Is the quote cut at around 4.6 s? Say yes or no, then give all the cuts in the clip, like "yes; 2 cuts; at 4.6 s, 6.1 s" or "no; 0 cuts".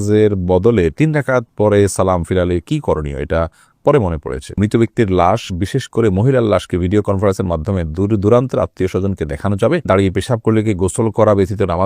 yes; 2 cuts; at 4.6 s, 9.8 s